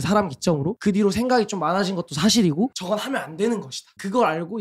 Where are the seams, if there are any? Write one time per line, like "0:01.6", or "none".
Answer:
0:02.7